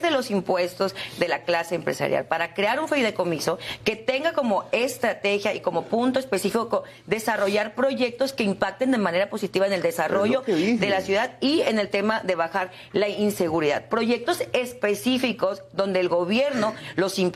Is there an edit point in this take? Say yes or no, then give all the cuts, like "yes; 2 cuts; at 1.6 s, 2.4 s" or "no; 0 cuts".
no; 0 cuts